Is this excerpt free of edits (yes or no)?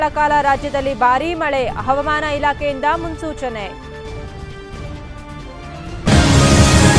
no